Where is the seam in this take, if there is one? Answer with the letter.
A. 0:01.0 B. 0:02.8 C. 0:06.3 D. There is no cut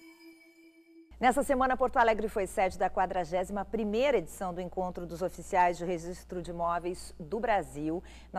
A